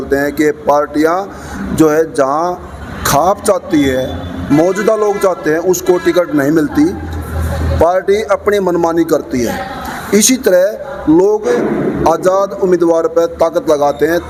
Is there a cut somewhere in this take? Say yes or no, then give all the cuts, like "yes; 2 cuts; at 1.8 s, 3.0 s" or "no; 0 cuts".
no; 0 cuts